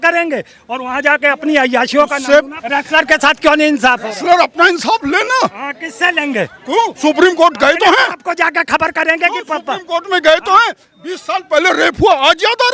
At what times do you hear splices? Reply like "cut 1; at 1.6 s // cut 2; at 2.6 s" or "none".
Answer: cut 1; at 2.6 s